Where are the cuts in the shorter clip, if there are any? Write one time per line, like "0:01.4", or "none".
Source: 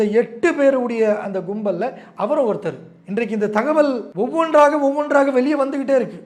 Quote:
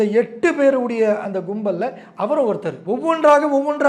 0:02.8